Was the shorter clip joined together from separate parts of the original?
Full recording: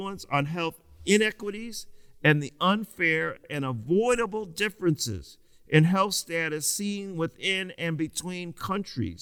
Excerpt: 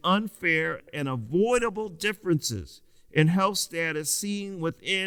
no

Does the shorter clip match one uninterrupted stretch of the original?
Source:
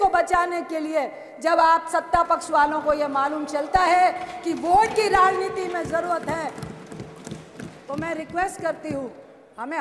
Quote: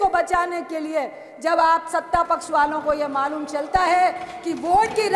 yes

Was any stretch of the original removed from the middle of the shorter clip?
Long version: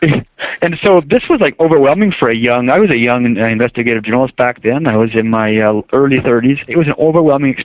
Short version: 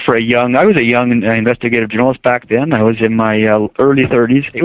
no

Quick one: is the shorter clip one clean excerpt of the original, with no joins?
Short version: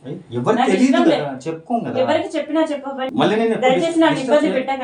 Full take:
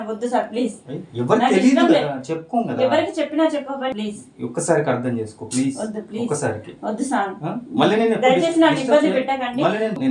no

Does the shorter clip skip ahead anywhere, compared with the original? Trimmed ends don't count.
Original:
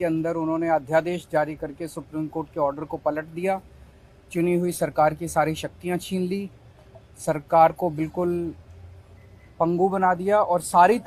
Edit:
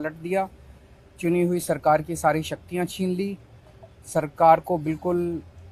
no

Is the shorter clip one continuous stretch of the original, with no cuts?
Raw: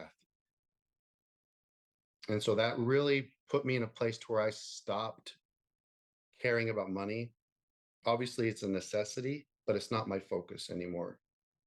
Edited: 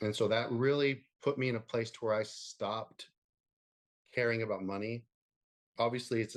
yes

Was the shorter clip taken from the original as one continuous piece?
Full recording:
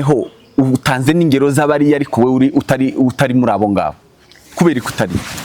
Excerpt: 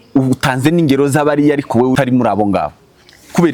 no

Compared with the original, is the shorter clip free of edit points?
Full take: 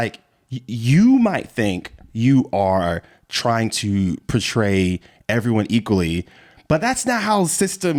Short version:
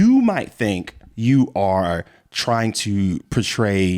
yes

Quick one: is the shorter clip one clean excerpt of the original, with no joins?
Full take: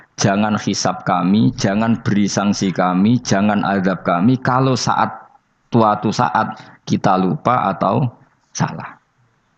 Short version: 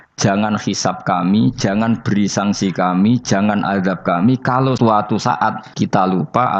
no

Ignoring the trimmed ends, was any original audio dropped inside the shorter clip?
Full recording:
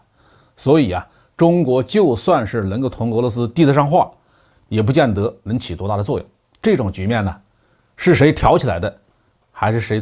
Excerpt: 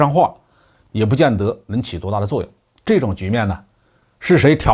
no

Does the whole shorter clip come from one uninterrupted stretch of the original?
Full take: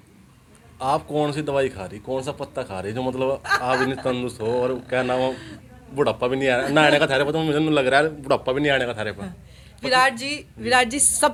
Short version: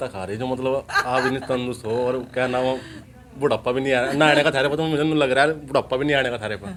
yes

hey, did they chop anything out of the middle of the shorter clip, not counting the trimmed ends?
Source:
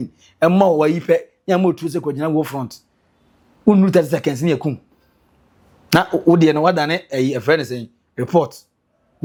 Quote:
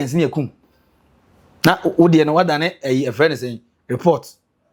no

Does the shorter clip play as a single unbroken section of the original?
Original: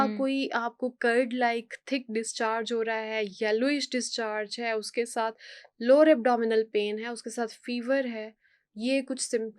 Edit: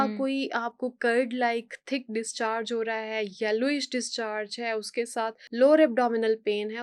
no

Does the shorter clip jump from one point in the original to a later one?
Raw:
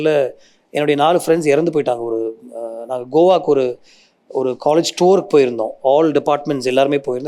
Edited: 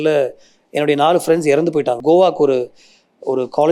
yes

